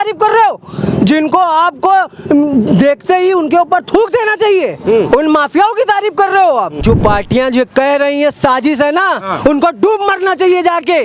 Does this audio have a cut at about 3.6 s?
no; 1 cut; at 6.8 s

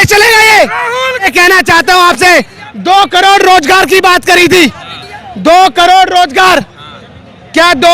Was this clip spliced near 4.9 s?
no; 1 cut; at 1.3 s

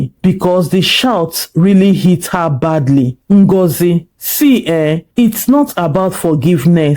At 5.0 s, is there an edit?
no; 1 cut; at 3.2 s

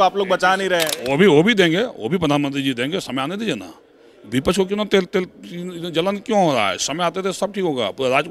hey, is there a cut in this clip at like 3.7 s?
no; 1 cut; at 1.0 s

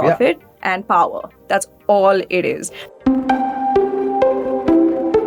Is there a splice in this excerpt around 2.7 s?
no; 0 cuts

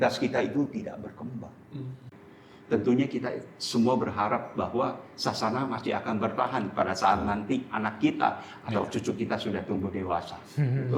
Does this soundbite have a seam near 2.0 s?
yes; 1 cut; at 2.0 s

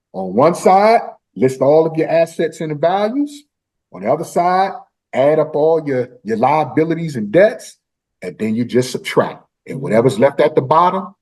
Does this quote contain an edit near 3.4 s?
no; 0 cuts

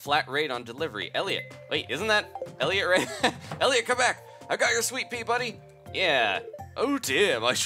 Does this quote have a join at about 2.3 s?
no; 0 cuts

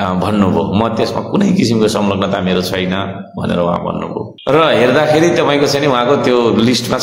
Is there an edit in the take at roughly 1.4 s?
no; 1 cut; at 4.3 s

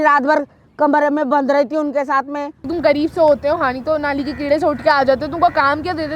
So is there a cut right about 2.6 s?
yes; 1 cut; at 2.6 s

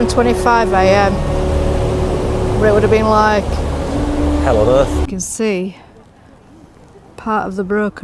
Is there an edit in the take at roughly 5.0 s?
yes; 1 cut; at 5.0 s

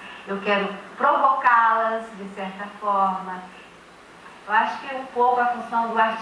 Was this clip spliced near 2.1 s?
no; 1 cut; at 3.9 s

